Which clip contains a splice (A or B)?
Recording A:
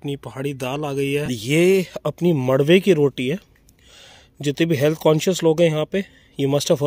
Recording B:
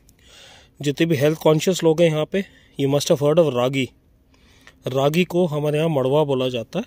A